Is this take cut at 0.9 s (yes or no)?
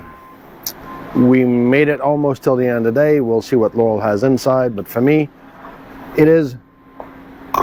no